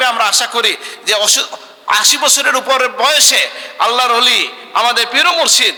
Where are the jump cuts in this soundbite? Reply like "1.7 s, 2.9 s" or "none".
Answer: none

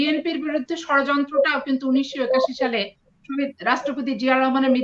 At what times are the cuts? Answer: none

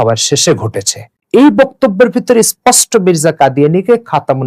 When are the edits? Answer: 1.2 s

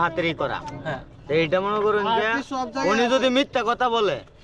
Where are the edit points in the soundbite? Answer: none

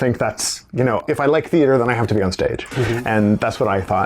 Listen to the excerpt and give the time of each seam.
1.0 s

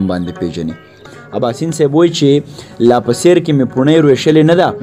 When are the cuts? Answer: 1.0 s

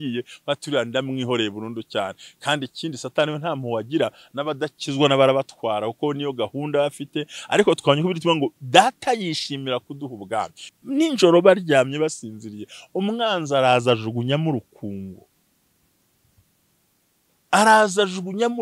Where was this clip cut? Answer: 10.6 s

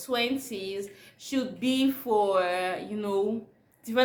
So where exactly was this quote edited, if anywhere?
none

